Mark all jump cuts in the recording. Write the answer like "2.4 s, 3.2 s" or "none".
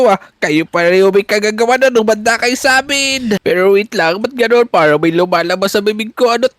3.4 s